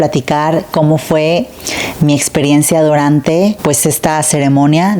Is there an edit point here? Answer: no; 0 cuts

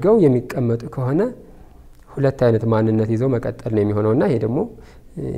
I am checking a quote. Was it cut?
no; 0 cuts

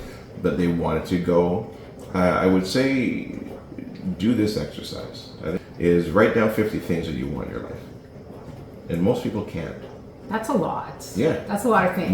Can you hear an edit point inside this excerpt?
yes; 1 cut; at 5.7 s

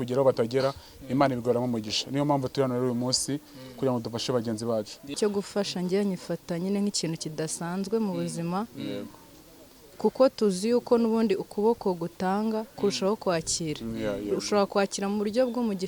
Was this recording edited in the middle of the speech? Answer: yes; 1 cut; at 5.2 s

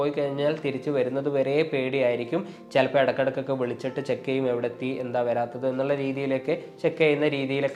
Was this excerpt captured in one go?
yes; 0 cuts

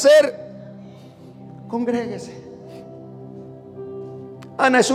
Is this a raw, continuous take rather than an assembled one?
yes; 0 cuts

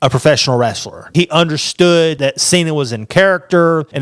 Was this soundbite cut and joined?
yes; 2 cuts; at 1.0 s, 2.2 s

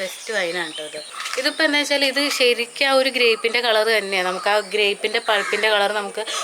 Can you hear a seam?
yes; 1 cut; at 1.1 s

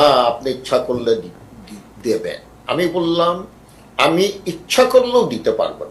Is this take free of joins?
yes; 0 cuts

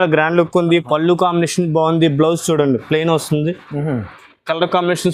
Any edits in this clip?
no; 0 cuts

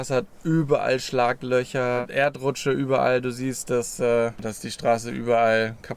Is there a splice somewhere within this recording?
yes; 2 cuts; at 2.1 s, 4.5 s

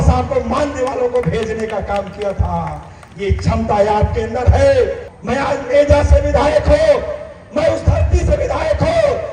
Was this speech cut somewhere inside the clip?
no; 0 cuts

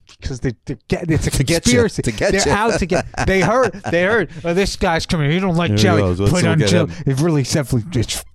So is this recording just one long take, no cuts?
yes; 0 cuts

